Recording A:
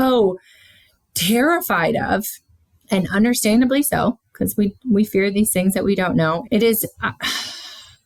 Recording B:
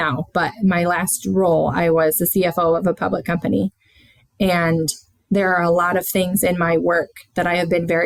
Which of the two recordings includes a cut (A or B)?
A